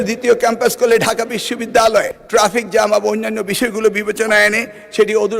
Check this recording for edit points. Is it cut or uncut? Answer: cut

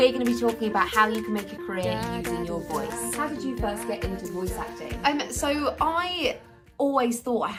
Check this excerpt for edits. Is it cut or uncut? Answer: uncut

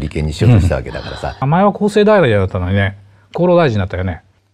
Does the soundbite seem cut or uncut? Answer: cut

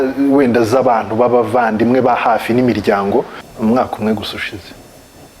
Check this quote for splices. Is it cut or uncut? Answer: cut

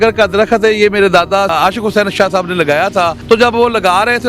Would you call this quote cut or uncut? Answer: cut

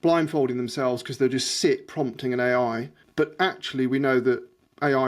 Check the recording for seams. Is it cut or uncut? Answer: cut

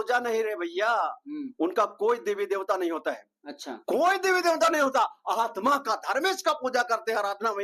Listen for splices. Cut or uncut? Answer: uncut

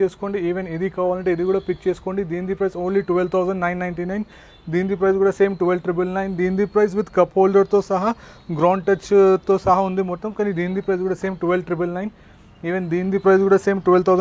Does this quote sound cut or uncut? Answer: uncut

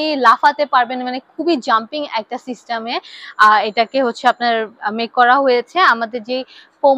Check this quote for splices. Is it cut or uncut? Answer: uncut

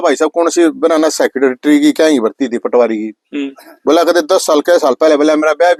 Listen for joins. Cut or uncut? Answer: uncut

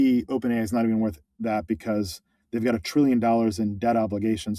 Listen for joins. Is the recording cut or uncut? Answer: uncut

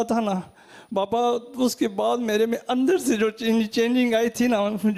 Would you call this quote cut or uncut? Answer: uncut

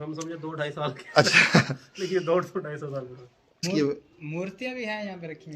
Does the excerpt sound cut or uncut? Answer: cut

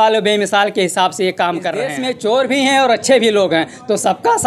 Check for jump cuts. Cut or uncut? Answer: cut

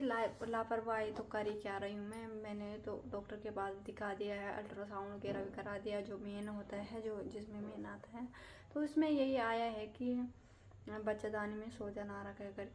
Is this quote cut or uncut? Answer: uncut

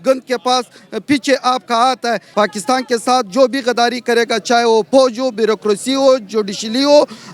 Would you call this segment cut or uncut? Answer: cut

